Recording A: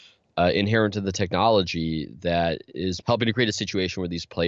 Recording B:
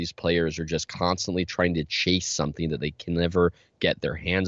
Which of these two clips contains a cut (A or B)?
A